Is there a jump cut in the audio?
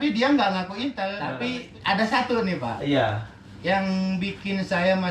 yes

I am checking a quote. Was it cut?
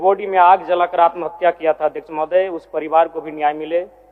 no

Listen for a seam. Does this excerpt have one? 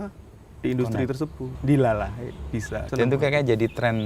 yes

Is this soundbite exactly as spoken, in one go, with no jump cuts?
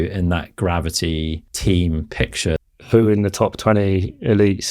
no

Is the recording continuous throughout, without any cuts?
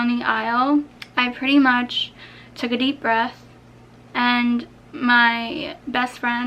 no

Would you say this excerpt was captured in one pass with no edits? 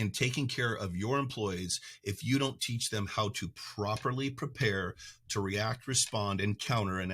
yes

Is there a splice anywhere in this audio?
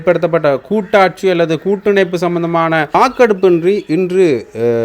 yes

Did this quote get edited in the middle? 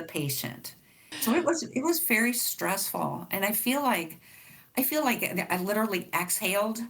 yes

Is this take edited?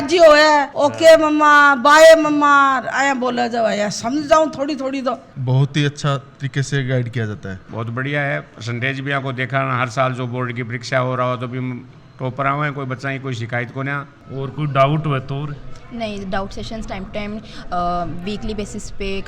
yes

